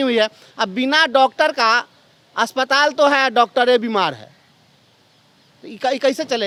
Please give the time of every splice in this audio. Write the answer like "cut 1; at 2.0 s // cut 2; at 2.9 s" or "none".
none